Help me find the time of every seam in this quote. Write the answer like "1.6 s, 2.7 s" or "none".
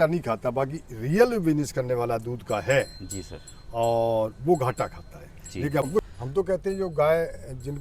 5.9 s